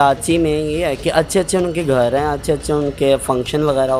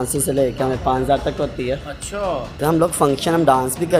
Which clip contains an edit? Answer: second; 1 cut; at 2.6 s

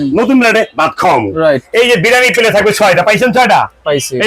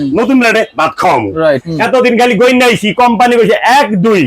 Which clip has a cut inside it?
second; 1 cut; at 1.6 s

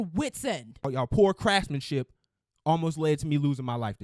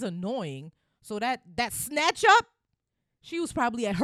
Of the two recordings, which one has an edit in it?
first; 1 cut; at 0.9 s

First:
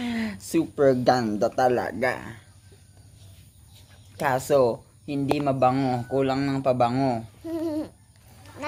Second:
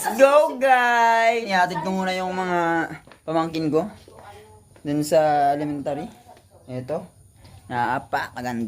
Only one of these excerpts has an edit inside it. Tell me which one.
second; 1 cut; at 1.5 s

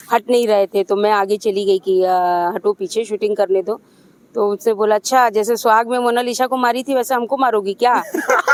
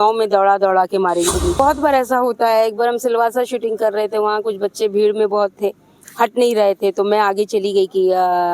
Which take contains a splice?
second; 1 cut; at 1.6 s

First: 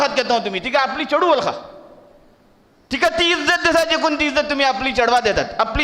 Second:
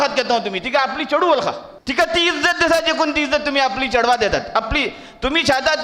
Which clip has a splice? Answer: second; 1 cut; at 1.7 s

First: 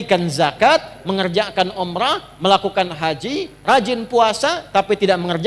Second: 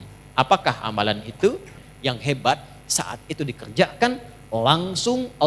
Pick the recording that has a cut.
second; 1 cut; at 1.8 s

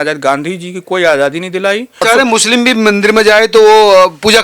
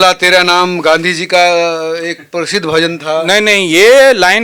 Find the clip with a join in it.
first; 1 cut; at 2.0 s

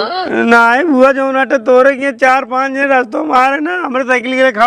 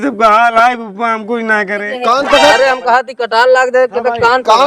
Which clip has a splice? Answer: second; 1 cut; at 1.9 s

